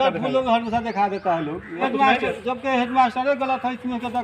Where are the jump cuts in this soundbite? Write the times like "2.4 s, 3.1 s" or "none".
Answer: 1.8 s